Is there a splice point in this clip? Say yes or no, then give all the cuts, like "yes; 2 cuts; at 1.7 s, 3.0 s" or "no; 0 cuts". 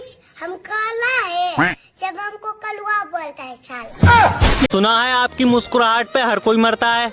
yes; 1 cut; at 4.7 s